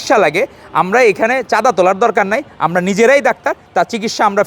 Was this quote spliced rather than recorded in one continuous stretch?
no; 0 cuts

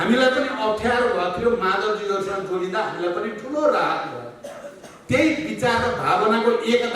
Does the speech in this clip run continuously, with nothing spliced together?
yes; 0 cuts

